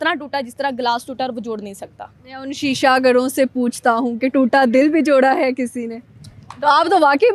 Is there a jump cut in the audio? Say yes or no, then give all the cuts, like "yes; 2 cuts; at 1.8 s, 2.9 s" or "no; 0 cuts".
no; 0 cuts